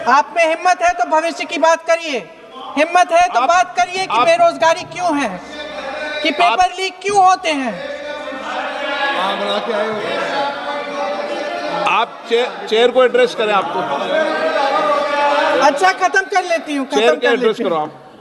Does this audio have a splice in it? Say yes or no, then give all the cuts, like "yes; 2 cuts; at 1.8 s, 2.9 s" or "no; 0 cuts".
no; 0 cuts